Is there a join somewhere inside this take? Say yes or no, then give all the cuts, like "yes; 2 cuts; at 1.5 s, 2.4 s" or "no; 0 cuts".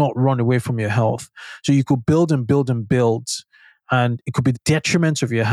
yes; 1 cut; at 4.5 s